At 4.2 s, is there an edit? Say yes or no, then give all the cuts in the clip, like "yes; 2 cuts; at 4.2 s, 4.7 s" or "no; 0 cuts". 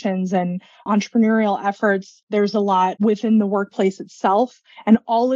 no; 3 cuts; at 0.9 s, 2.2 s, 3.0 s